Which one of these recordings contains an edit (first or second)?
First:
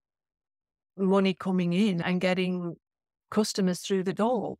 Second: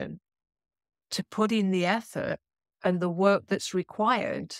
first